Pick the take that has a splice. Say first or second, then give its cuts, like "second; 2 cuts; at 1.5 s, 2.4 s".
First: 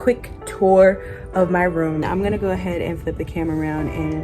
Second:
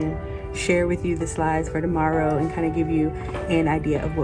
first; 1 cut; at 2.0 s